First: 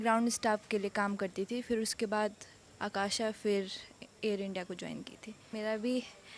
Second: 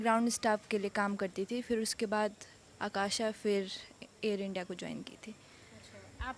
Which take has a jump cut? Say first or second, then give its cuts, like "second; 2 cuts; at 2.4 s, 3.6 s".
first; 1 cut; at 5.4 s